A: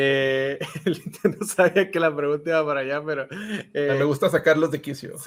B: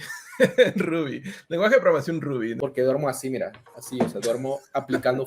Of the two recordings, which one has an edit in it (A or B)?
B